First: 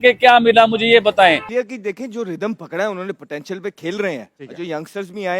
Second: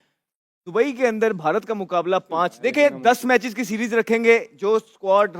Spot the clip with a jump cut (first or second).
first